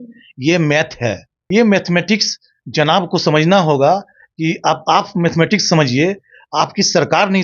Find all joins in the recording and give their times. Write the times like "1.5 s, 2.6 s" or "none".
1.3 s